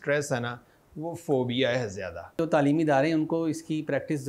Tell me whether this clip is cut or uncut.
cut